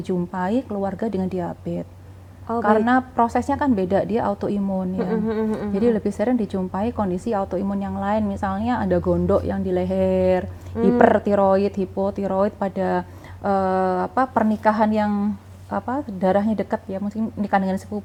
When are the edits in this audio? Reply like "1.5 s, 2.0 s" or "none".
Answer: none